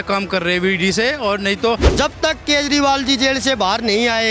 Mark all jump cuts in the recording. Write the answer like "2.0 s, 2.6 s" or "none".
1.9 s

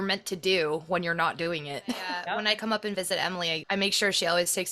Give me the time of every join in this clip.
2.2 s, 3.6 s

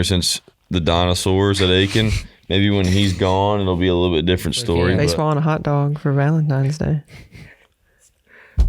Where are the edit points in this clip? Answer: 5.0 s

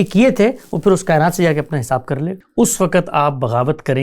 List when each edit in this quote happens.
2.4 s

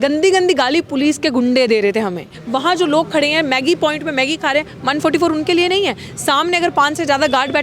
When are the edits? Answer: 2.3 s

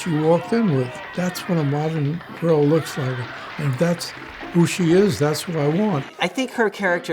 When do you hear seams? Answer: 1.0 s, 6.1 s

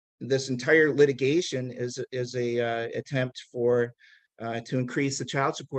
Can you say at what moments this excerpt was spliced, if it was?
none

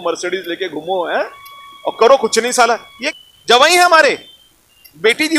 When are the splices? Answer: 3.0 s

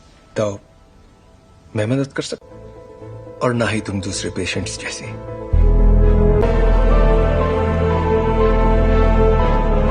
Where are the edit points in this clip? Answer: 6.4 s

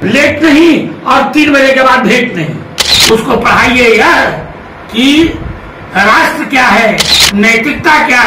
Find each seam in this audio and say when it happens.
2.9 s

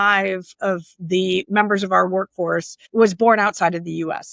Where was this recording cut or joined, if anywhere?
1.5 s, 2.8 s

